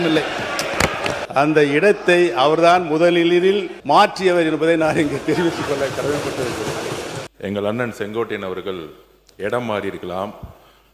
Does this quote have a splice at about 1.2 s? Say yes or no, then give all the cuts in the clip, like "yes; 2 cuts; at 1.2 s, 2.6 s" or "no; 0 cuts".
yes; 3 cuts; at 1.2 s, 3.7 s, 7.2 s